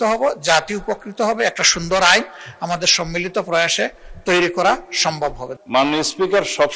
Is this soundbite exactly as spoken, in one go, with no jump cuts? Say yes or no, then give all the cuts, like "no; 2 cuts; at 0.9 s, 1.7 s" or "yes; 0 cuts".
no; 1 cut; at 5.5 s